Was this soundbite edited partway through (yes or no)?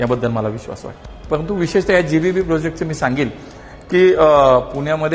no